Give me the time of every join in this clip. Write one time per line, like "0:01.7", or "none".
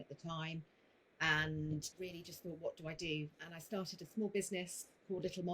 0:01.9
0:03.4